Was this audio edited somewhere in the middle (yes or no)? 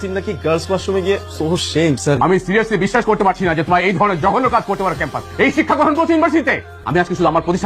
yes